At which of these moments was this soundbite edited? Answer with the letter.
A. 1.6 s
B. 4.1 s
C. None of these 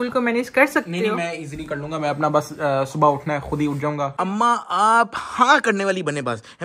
B